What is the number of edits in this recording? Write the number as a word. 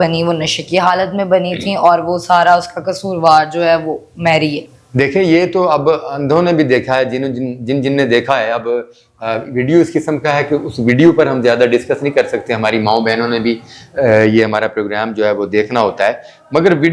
zero